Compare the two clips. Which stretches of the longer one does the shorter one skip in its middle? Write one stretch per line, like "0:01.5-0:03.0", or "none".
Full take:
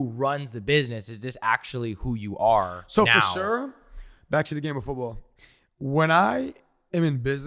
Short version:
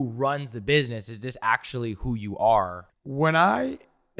0:02.8-0:05.5